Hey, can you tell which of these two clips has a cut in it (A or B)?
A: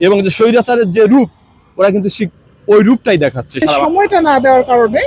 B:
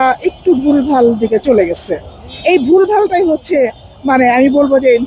A